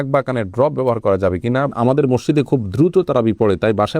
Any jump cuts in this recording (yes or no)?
yes